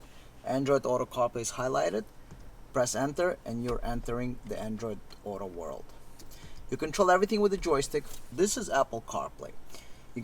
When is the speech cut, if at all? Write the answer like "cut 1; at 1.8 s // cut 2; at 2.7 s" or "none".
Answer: cut 1; at 8.3 s